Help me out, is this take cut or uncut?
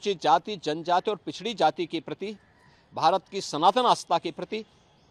uncut